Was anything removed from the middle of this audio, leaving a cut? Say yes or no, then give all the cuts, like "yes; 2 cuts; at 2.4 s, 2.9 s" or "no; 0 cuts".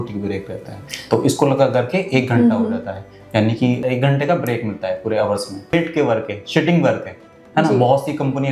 yes; 2 cuts; at 3.8 s, 5.7 s